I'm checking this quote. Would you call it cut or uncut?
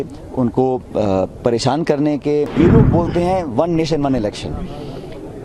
cut